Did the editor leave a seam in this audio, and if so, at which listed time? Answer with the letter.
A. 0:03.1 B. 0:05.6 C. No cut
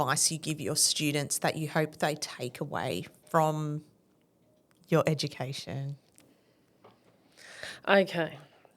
A